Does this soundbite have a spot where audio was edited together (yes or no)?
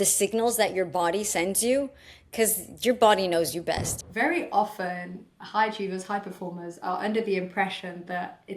yes